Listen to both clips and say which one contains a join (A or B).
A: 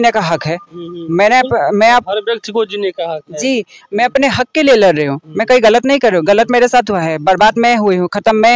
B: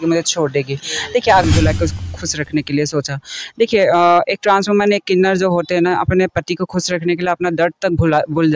B